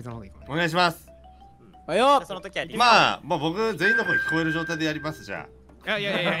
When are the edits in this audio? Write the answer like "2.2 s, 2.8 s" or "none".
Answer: none